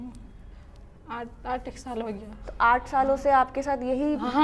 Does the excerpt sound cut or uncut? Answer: uncut